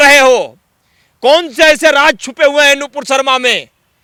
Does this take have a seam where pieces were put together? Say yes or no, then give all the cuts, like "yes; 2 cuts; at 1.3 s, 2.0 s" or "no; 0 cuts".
no; 0 cuts